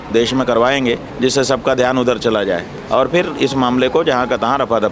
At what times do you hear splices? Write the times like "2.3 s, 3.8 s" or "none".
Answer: 1.1 s, 2.7 s